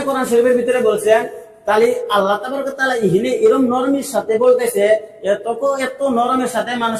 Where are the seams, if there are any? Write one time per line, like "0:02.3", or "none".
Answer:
none